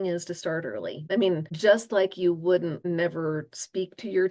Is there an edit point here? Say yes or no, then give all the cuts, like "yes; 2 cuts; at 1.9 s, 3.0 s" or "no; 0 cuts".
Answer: yes; 2 cuts; at 1.1 s, 2.8 s